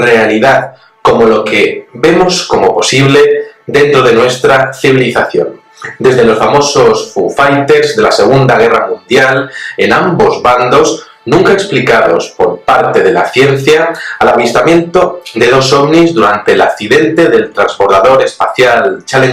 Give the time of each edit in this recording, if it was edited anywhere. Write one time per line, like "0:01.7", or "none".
none